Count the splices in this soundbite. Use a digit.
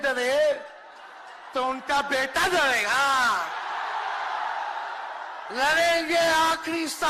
0